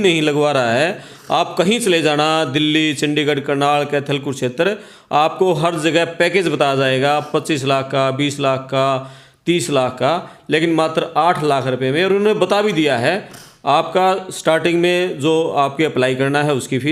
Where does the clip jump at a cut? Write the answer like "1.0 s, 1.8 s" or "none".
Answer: none

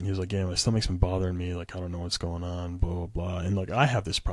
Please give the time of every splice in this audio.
none

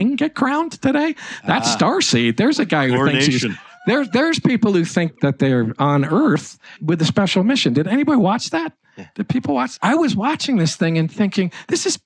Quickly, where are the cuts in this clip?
5.1 s, 6.8 s, 9.7 s

